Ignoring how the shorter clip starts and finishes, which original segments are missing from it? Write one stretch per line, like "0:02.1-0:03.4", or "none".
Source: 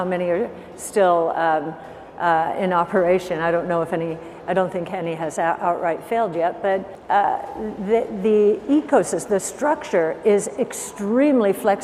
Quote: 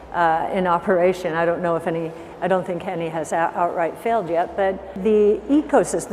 0:07.0-0:08.1